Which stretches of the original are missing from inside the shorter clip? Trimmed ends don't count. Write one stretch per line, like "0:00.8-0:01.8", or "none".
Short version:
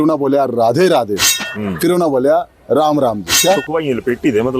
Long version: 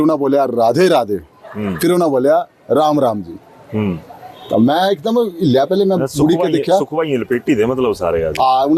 0:03.4-0:06.6